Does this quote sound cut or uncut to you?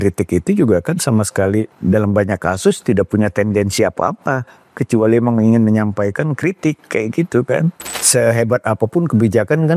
cut